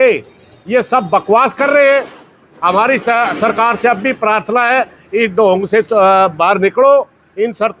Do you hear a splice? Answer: no; 0 cuts

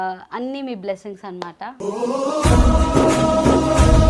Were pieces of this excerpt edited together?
no; 0 cuts

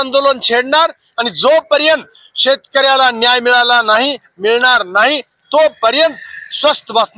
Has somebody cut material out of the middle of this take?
no; 0 cuts

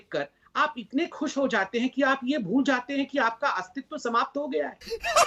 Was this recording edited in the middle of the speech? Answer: no; 0 cuts

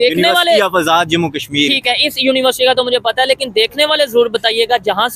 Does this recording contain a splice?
no; 0 cuts

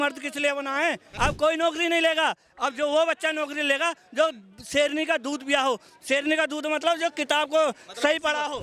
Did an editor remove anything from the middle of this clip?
yes; 1 cut; at 1.1 s

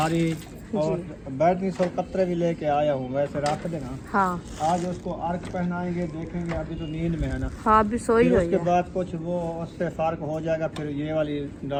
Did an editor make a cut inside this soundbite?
no; 0 cuts

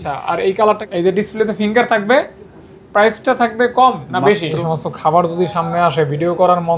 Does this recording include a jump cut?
yes; 2 cuts; at 0.8 s, 4.5 s

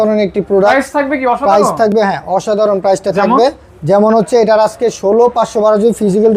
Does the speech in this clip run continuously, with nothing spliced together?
yes; 0 cuts

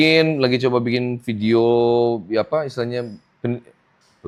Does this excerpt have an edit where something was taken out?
no; 0 cuts

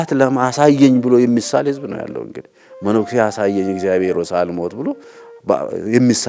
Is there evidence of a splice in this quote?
no; 0 cuts

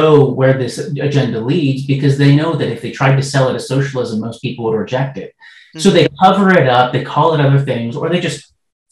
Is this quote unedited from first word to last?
yes; 0 cuts

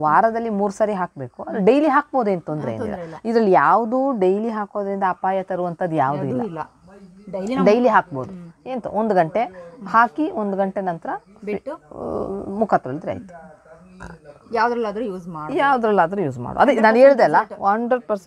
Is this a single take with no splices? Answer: yes; 0 cuts

